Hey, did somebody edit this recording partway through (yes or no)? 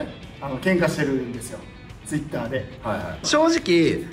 yes